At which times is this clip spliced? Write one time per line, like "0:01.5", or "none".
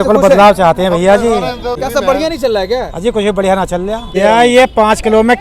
0:01.8
0:04.1

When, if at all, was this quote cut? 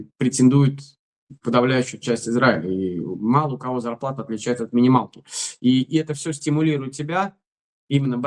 none

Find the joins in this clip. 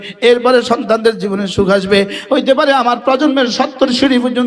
0:02.2

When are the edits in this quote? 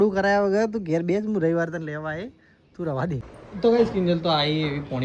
0:03.3

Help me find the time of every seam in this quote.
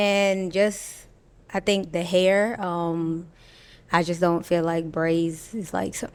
none

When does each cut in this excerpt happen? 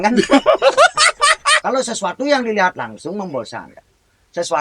0:01.6

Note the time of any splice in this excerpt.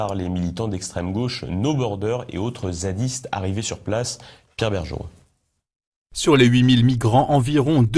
0:06.5

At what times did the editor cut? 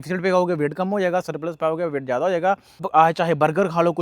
0:02.8

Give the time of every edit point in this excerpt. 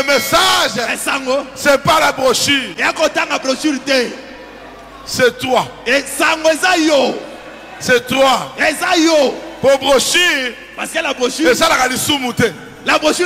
none

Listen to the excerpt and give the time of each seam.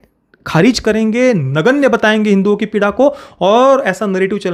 none

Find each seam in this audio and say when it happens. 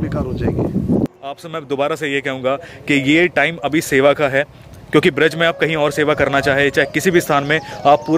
0:01.1

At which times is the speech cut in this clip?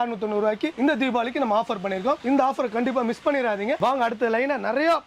none

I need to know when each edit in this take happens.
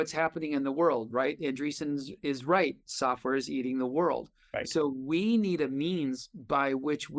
none

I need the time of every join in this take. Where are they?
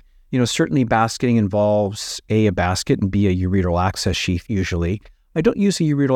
0:04.4

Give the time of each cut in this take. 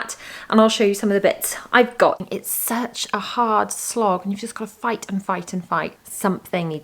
0:02.2

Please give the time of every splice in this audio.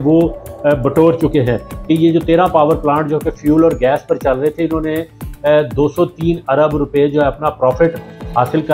0:01.7

